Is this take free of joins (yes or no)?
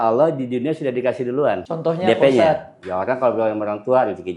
no